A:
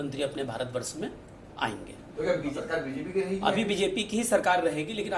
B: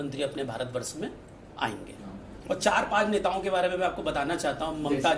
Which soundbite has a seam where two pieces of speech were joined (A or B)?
B